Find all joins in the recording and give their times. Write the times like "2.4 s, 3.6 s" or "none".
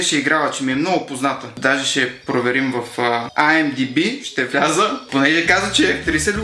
1.5 s